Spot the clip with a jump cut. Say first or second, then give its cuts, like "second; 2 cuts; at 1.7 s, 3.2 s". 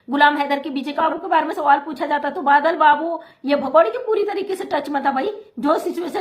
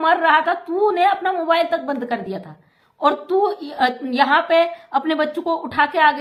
first; 1 cut; at 1.0 s